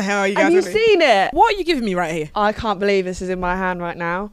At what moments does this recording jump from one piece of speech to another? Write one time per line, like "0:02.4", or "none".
0:01.3
0:02.3